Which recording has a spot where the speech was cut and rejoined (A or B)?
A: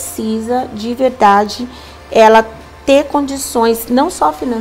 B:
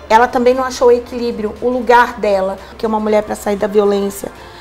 B